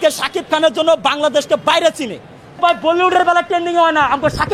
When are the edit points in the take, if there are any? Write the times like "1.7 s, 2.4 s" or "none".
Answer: 2.6 s